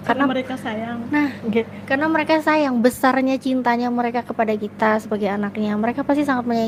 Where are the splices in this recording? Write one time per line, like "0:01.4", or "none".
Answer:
none